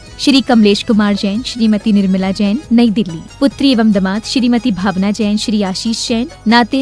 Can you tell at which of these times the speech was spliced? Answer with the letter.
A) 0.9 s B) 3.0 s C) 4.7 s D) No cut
D